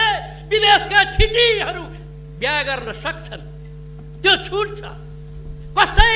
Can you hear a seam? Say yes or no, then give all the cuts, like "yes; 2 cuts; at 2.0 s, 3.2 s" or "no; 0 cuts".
no; 0 cuts